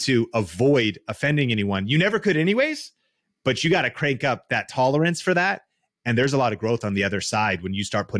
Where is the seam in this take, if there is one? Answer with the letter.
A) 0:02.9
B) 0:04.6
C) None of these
C